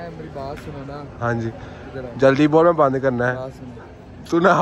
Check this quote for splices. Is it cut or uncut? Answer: uncut